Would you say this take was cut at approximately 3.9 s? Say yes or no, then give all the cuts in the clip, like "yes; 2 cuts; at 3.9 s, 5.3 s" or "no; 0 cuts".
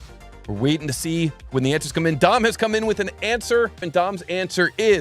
yes; 1 cut; at 3.9 s